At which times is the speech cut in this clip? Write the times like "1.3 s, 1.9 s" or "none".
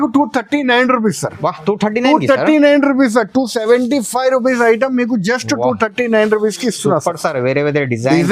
none